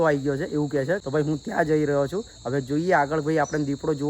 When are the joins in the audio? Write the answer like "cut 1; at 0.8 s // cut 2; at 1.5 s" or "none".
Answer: cut 1; at 1.0 s